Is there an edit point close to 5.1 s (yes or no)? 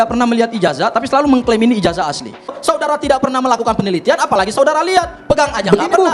no